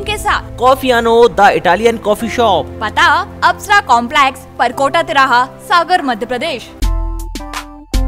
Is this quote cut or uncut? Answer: cut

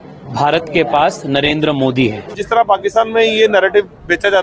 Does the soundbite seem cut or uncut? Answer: cut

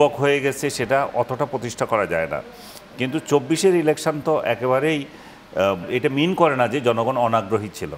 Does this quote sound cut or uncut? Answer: cut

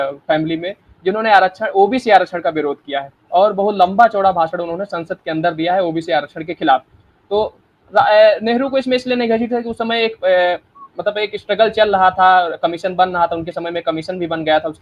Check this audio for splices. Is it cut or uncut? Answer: uncut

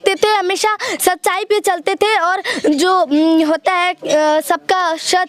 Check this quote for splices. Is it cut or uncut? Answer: uncut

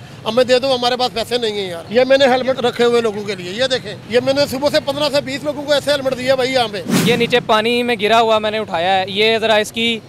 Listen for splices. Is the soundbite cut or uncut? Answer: cut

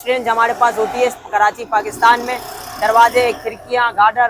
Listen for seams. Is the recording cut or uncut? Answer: uncut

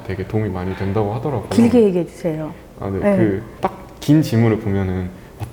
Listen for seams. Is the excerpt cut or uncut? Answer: uncut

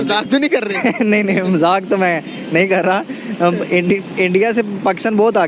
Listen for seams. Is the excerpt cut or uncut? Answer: uncut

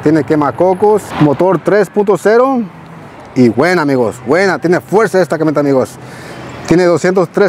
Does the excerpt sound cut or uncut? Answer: cut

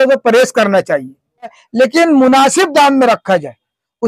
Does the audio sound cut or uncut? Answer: cut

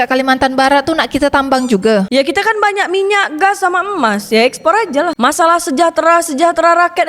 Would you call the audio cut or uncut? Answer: cut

